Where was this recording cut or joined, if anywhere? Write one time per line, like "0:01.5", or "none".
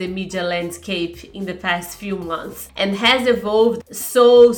0:02.6
0:03.8